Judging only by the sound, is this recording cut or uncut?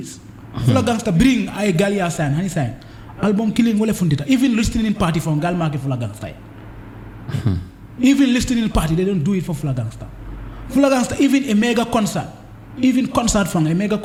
uncut